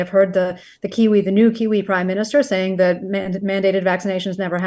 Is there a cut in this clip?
no; 0 cuts

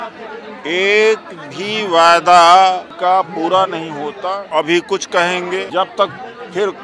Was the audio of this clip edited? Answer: yes; 3 cuts; at 2.9 s, 4.4 s, 5.7 s

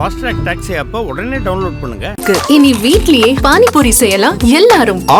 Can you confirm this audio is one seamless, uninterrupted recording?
yes; 0 cuts

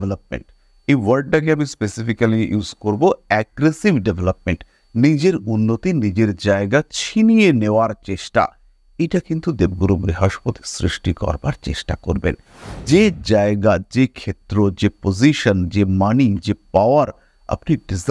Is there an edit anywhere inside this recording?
no; 0 cuts

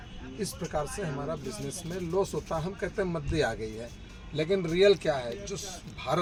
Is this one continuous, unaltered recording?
yes; 0 cuts

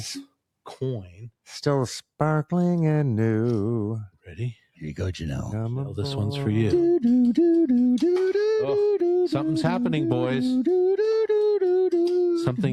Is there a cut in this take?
no; 0 cuts

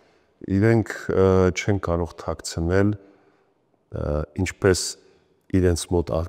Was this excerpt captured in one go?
yes; 0 cuts

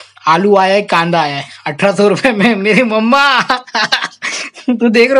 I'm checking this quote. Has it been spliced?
no; 0 cuts

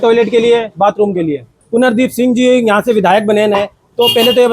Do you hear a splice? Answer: yes; 1 cut; at 1.6 s

